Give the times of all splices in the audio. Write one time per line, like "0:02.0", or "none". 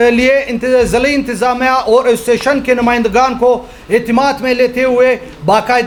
none